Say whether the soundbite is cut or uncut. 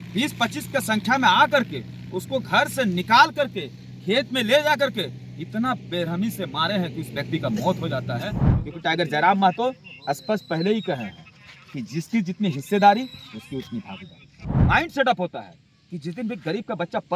cut